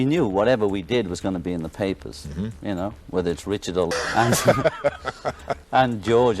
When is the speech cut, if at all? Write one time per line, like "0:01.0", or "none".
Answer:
0:03.9

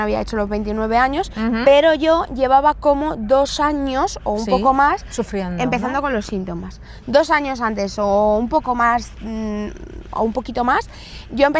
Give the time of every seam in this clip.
none

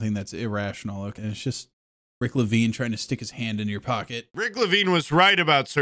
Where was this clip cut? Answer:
0:01.2
0:04.3

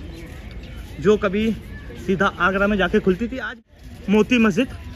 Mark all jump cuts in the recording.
0:03.6

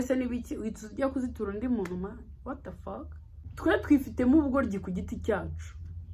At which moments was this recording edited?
0:03.5

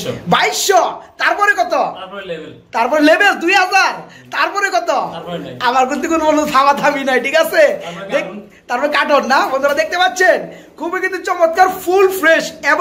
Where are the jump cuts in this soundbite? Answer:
none

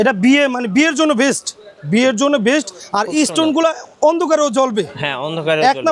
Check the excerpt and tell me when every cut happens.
0:02.8

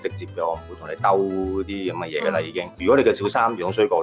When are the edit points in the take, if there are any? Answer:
0:02.7

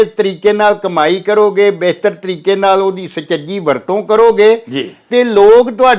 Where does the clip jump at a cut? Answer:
none

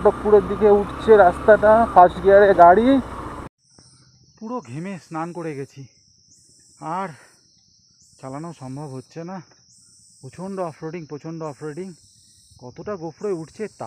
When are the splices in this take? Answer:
0:03.5

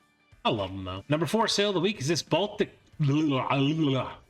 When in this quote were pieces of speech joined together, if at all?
0:01.0

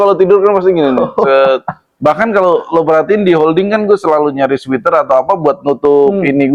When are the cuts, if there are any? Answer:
none

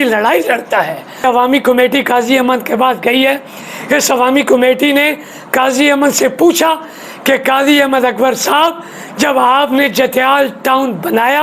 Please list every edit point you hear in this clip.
0:01.2

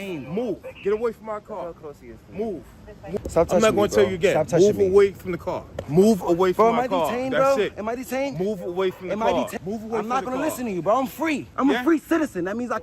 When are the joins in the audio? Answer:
0:03.2
0:05.8
0:09.5
0:11.5

